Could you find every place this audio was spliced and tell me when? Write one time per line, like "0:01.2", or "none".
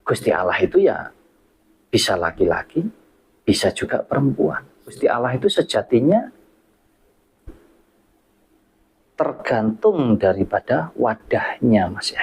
0:05.0